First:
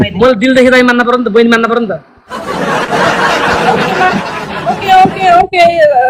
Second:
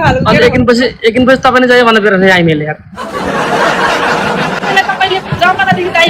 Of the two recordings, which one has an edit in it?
second; 1 cut; at 4.6 s

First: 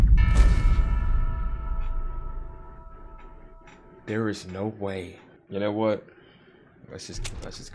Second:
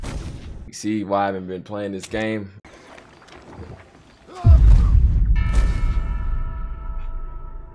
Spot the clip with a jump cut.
second; 1 cut; at 2.5 s

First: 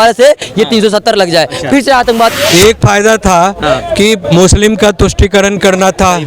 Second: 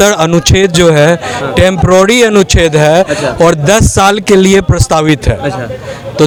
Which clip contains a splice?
first; 1 cut; at 2.3 s

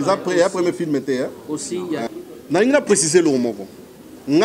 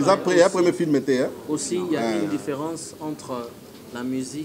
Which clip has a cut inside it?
first; 1 cut; at 2.1 s

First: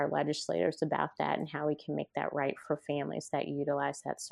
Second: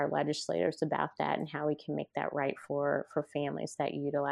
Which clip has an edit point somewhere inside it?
first; 1 cut; at 2.6 s

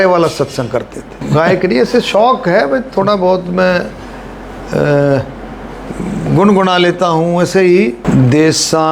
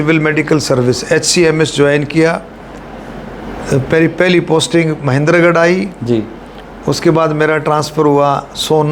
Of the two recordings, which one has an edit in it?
first; 1 cut; at 1.2 s

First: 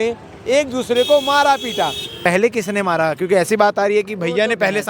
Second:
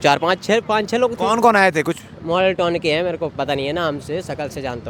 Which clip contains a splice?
first; 1 cut; at 2.1 s

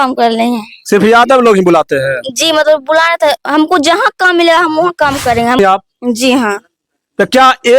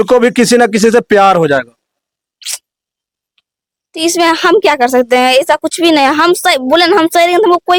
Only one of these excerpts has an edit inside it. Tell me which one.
first; 1 cut; at 5.6 s

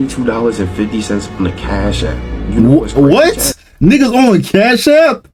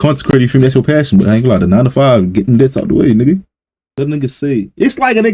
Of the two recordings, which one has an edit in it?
second; 1 cut; at 4.0 s

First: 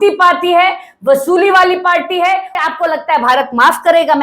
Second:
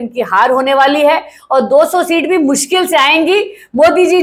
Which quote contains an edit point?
first; 1 cut; at 2.5 s

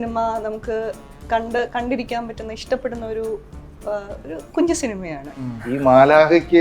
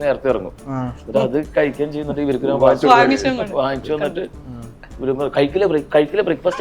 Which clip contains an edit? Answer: first; 1 cut; at 5.6 s

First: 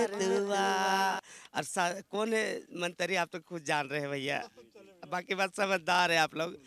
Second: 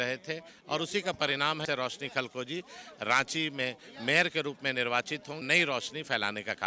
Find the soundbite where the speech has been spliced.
second; 2 cuts; at 1.6 s, 5.4 s

